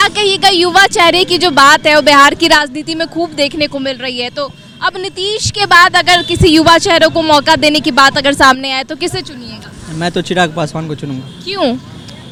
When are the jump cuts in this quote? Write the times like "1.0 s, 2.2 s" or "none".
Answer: none